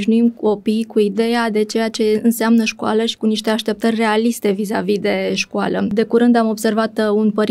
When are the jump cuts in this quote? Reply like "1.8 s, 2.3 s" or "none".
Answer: 5.9 s